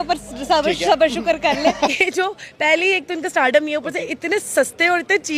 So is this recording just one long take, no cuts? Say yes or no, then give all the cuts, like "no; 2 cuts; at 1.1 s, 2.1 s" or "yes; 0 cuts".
no; 1 cut; at 1.9 s